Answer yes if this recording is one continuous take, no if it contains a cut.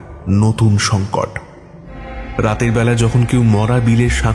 no